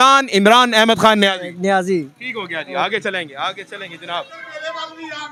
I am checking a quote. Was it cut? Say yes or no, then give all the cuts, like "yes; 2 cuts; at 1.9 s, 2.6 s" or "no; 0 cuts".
no; 0 cuts